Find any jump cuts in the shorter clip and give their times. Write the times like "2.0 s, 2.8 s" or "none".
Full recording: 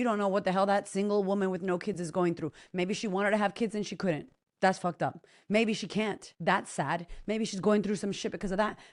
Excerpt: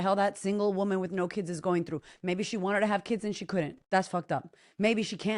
3.8 s